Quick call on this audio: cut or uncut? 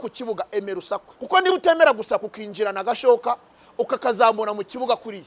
cut